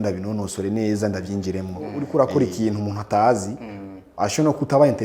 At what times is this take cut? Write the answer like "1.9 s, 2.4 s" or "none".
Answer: 2.0 s

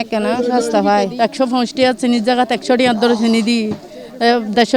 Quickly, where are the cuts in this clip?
1.1 s

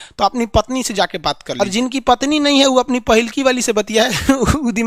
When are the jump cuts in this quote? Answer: 1.6 s

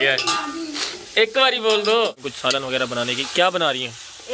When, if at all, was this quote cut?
2.3 s

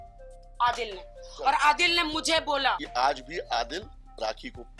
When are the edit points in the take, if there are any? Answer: 2.9 s

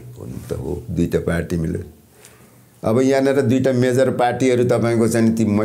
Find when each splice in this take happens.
none

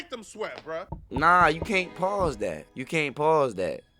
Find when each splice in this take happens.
1.0 s, 2.7 s

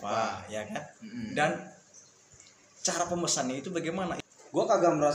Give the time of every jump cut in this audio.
4.2 s

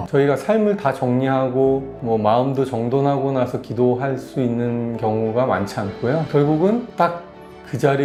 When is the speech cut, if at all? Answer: none

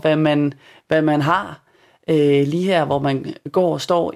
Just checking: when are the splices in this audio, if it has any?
none

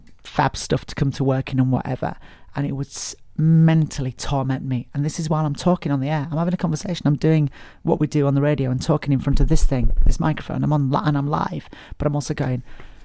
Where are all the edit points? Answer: none

